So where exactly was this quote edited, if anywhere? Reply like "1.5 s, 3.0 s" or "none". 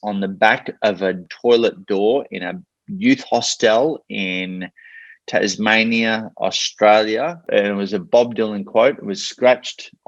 1.2 s, 7.4 s